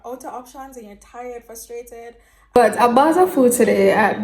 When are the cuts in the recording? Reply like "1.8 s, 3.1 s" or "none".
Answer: 2.6 s